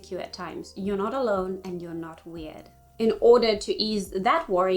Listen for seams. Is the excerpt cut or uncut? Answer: cut